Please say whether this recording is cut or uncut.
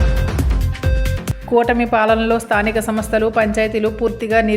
uncut